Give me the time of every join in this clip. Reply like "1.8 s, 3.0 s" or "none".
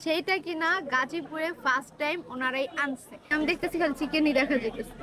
3.3 s